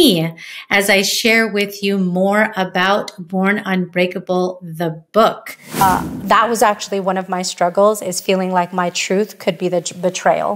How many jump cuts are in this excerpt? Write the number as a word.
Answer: one